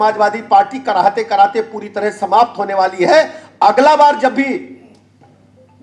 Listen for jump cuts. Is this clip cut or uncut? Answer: uncut